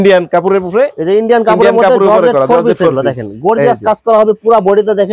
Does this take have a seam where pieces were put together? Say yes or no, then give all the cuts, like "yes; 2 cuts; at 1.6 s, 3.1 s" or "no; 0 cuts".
no; 0 cuts